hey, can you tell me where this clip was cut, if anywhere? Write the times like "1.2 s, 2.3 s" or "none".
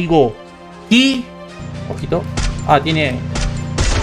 1.4 s